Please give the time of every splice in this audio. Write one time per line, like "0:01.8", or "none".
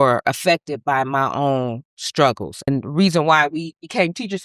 0:02.7